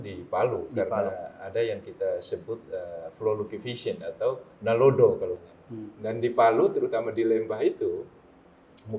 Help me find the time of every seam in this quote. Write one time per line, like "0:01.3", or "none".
0:05.4